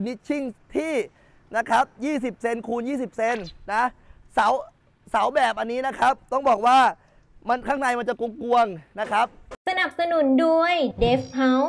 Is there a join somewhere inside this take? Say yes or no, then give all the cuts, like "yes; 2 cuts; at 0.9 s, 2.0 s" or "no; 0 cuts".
yes; 1 cut; at 9.5 s